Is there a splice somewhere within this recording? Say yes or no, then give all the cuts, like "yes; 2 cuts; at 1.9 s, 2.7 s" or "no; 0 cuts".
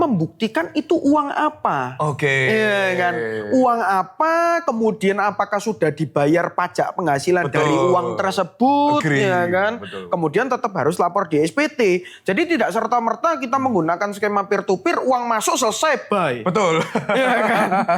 no; 0 cuts